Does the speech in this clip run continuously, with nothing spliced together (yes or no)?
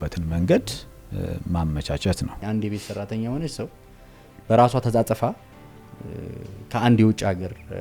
no